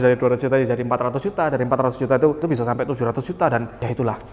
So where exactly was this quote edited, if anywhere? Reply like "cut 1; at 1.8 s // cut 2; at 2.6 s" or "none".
cut 1; at 2.4 s